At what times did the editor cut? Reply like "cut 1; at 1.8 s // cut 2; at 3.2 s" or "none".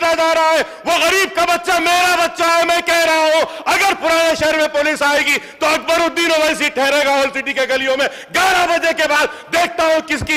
none